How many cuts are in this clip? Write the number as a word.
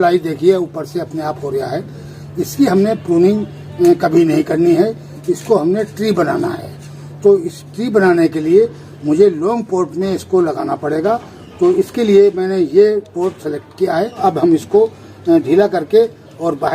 one